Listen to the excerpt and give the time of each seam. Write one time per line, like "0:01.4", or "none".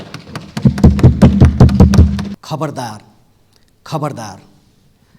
0:02.4